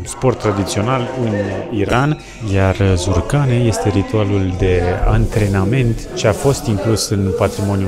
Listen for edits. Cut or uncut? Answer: uncut